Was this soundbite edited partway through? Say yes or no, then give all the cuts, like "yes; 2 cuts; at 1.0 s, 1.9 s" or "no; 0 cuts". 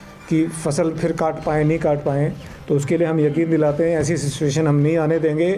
no; 0 cuts